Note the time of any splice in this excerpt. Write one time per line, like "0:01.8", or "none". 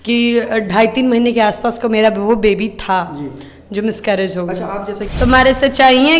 0:05.0